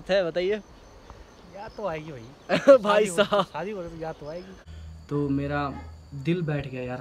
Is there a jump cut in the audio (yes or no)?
yes